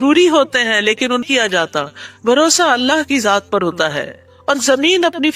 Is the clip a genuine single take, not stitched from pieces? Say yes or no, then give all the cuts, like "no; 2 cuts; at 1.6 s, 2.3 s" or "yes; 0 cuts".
no; 1 cut; at 1.3 s